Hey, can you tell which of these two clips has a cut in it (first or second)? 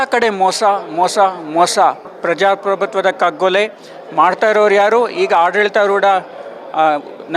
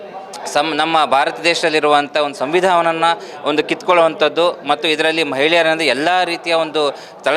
first